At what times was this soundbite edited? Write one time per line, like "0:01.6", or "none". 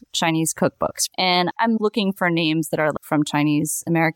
0:01.2
0:02.9